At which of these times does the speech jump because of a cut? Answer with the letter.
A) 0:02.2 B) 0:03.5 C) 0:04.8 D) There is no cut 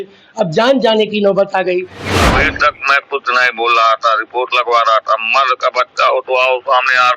A